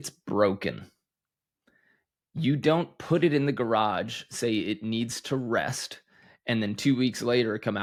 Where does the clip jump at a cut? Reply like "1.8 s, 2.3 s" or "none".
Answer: none